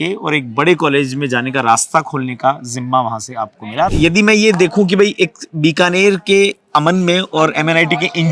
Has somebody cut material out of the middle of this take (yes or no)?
yes